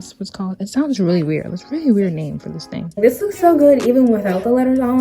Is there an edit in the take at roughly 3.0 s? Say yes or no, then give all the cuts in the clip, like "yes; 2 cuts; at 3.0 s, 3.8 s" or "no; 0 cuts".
yes; 1 cut; at 3.0 s